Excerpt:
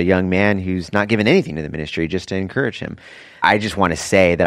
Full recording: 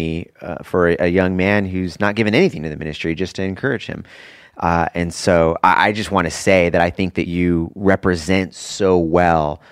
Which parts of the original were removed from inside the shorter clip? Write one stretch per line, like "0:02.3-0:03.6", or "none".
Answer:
0:04.5-0:05.8